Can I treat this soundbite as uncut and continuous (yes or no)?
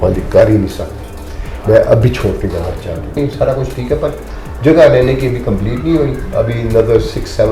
no